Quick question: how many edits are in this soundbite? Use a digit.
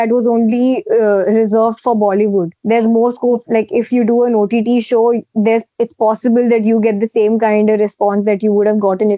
1